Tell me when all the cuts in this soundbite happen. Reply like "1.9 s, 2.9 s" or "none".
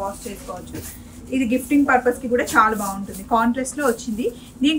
none